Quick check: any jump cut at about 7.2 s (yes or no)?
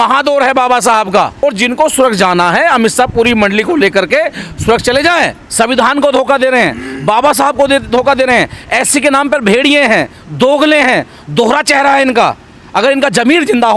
no